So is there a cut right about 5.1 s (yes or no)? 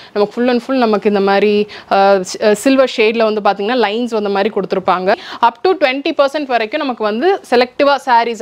yes